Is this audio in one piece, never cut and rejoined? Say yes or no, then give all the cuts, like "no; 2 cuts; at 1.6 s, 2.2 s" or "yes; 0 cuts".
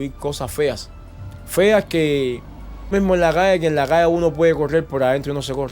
no; 1 cut; at 2.9 s